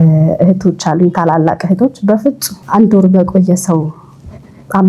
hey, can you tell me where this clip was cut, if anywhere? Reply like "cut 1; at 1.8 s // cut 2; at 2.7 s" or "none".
cut 1; at 2.5 s